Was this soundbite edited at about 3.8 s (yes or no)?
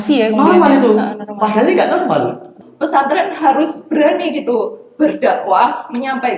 no